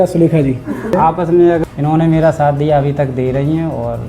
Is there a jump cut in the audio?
yes; 2 cuts; at 0.9 s, 1.6 s

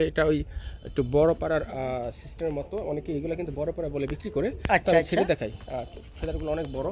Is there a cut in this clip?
no; 0 cuts

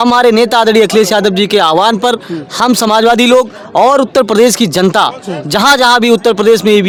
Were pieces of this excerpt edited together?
no; 0 cuts

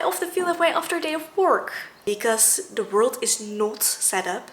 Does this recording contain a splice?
yes; 1 cut; at 1.9 s

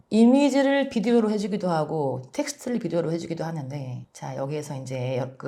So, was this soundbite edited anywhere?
no; 0 cuts

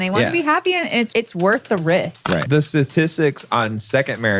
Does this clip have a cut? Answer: yes; 2 cuts; at 1.1 s, 2.4 s

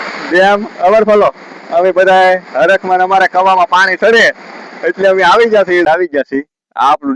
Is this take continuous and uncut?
no; 1 cut; at 5.8 s

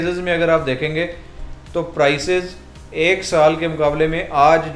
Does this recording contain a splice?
no; 0 cuts

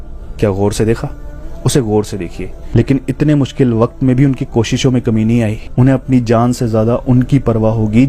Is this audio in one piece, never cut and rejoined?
no; 1 cut; at 2.6 s

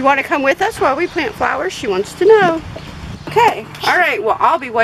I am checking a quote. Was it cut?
yes; 1 cut; at 3.2 s

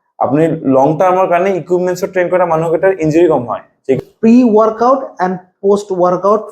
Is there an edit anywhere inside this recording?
yes; 1 cut; at 4.0 s

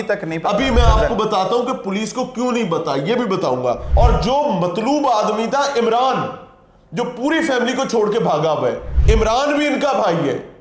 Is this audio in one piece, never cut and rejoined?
no; 2 cuts; at 3.9 s, 8.9 s

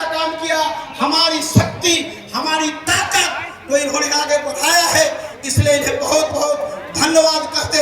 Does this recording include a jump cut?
no; 0 cuts

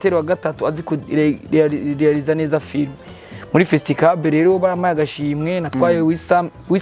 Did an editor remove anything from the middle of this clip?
no; 0 cuts

